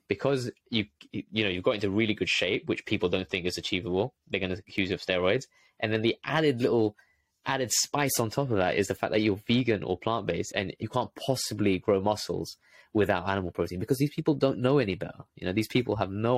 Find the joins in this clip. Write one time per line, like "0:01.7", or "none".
0:10.7